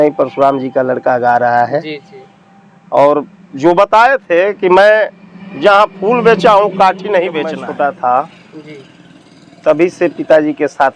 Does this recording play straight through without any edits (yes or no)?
no